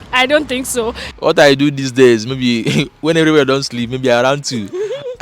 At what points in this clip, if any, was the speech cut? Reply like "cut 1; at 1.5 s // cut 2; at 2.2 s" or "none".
cut 1; at 1.2 s